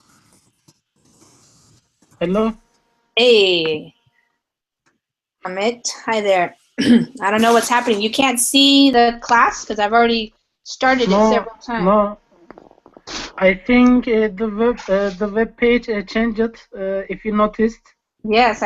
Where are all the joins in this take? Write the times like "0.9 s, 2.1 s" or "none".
none